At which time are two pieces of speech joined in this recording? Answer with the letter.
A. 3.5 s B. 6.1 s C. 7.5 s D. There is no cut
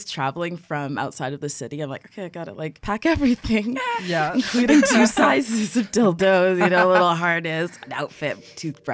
D